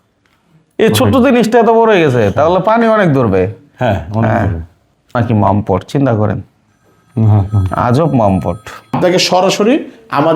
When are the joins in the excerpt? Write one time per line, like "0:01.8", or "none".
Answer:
0:05.2
0:09.0